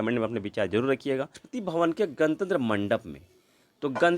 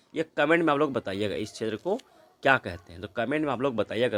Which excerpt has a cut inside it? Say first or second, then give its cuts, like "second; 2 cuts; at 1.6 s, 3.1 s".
first; 1 cut; at 1.4 s